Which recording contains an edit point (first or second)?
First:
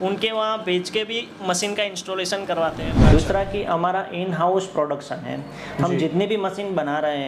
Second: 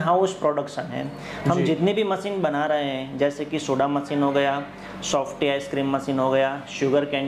first